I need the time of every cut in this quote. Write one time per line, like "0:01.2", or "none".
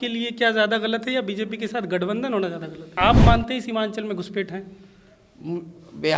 0:03.0